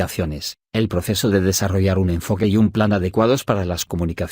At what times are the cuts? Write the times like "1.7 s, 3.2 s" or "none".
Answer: 1.0 s

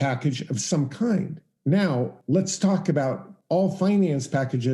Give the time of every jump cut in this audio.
1.4 s, 2.2 s, 3.3 s

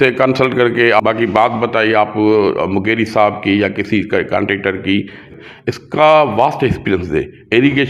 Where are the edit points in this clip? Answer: 1.0 s, 5.3 s

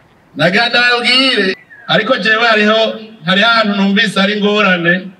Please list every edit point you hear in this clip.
1.7 s

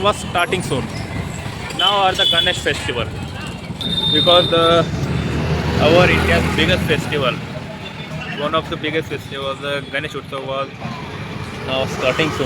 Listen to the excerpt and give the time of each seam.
3.8 s

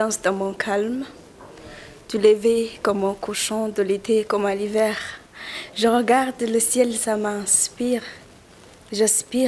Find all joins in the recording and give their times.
none

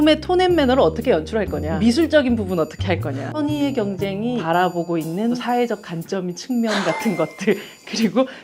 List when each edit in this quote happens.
1.6 s, 3.2 s, 4.4 s, 5.4 s

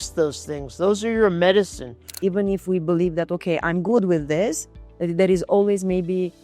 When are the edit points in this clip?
2.1 s

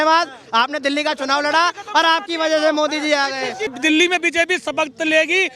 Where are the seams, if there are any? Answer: 3.7 s

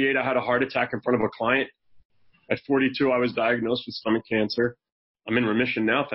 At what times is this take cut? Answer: none

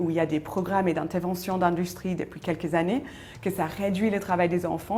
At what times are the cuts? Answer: none

